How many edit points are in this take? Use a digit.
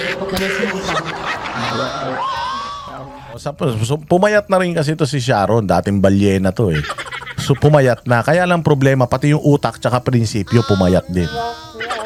0